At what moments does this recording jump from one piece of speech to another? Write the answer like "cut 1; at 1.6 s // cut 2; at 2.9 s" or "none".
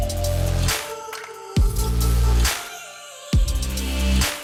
none